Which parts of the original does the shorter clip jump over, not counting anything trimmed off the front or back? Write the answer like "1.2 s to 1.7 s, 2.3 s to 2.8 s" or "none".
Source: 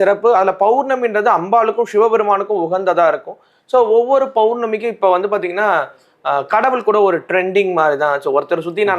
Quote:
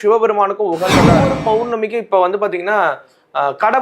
3.1 s to 4.1 s